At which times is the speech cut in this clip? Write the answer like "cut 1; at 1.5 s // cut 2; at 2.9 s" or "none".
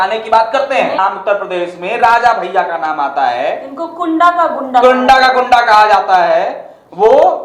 cut 1; at 1.0 s